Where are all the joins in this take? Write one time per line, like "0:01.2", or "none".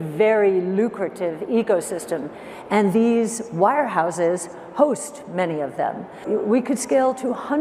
0:06.2